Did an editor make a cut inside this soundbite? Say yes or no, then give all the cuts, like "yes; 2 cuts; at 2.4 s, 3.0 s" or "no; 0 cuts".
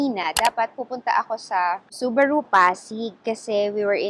yes; 1 cut; at 1.9 s